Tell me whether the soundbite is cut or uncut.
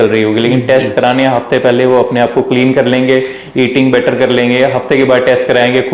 uncut